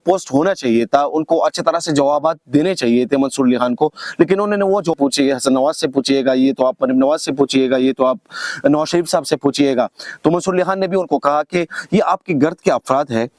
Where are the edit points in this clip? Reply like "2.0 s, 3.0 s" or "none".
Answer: 4.9 s